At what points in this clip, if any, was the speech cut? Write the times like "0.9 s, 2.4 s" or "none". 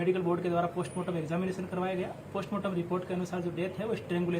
2.7 s